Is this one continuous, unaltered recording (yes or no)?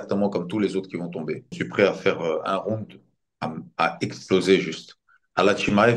no